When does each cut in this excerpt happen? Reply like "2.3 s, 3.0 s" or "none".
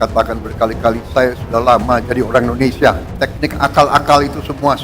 3.1 s